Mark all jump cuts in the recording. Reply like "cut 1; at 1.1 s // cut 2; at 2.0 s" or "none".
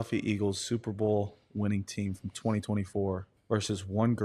cut 1; at 3.3 s